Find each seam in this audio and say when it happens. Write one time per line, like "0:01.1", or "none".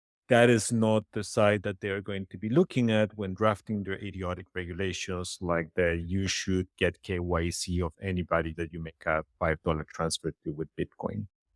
none